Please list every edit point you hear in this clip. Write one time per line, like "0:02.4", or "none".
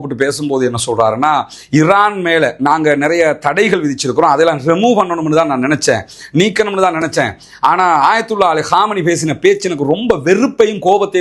none